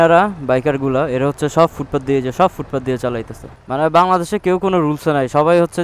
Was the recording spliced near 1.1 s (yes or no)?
no